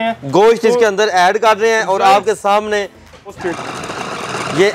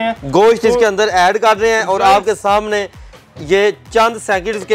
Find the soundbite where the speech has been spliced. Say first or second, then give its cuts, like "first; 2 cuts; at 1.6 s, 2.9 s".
first; 1 cut; at 3.4 s